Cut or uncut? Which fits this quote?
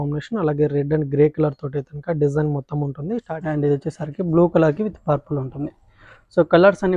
cut